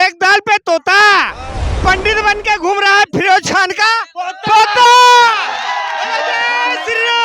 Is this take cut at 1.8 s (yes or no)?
yes